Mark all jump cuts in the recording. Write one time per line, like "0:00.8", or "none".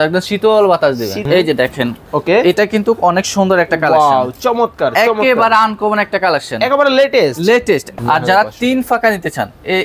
0:01.2
0:07.9